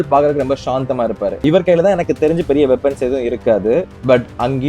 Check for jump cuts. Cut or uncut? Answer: cut